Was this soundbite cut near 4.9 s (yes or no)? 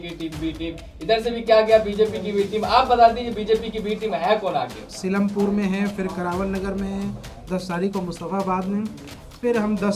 yes